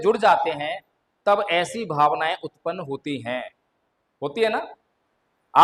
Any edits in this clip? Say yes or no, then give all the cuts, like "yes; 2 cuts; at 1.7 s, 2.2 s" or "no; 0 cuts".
no; 0 cuts